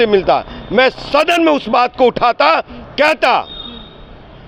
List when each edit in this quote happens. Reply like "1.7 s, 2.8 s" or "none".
none